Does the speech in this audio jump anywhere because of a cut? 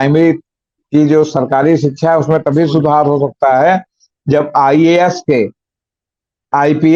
no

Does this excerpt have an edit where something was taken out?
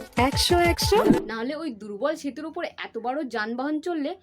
yes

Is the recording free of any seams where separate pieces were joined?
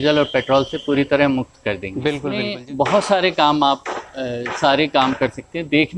no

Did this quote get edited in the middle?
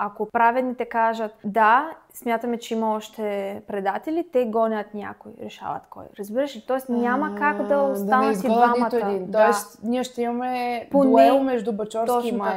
no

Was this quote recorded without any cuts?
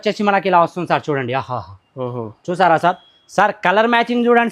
yes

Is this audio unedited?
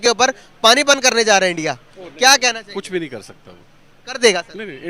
yes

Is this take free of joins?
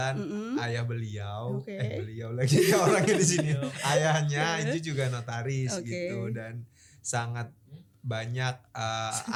yes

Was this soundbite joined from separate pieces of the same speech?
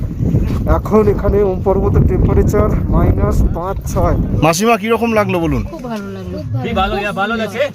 yes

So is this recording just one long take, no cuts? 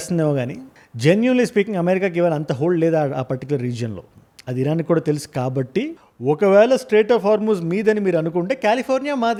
yes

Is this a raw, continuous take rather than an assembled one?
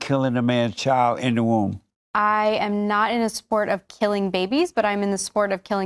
yes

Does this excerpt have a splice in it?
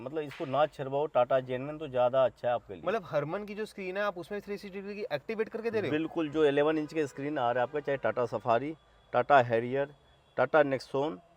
no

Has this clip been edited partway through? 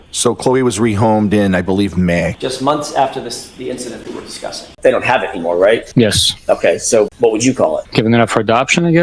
yes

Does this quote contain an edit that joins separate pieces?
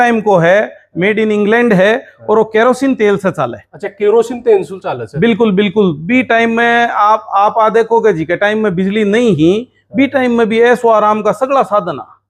no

